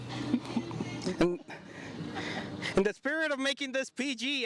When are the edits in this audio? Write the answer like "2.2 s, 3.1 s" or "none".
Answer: none